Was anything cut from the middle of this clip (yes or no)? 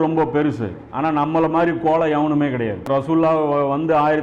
yes